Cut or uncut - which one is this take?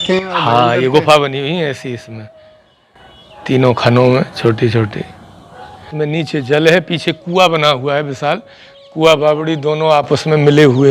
cut